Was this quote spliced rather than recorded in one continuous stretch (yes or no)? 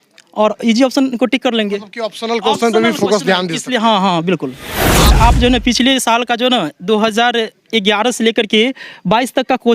yes